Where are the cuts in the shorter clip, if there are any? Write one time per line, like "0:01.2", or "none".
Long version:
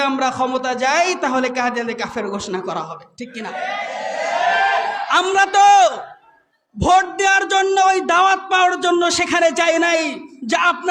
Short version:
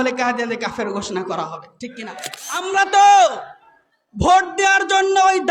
0:02.5